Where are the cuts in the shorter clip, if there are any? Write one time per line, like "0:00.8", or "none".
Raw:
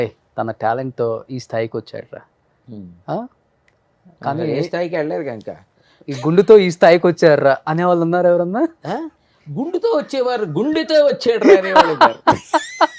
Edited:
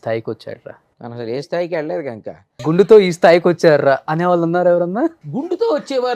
0:01.2
0:02.5
0:05.2